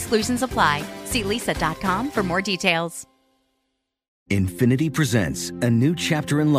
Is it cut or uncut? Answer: cut